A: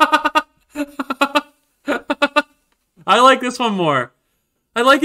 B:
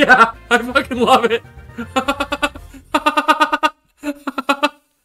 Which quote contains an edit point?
A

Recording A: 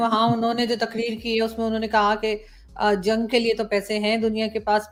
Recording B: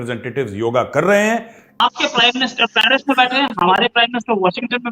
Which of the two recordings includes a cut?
B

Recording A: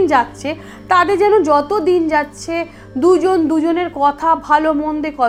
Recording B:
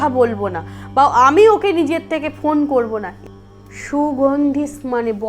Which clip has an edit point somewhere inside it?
B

